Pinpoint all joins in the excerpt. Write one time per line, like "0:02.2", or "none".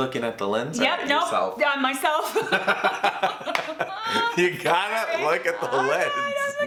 none